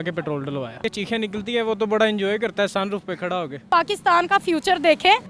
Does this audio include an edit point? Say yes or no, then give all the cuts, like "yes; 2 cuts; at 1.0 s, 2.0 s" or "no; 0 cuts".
yes; 2 cuts; at 0.8 s, 3.7 s